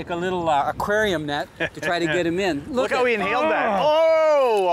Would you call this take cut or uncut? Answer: uncut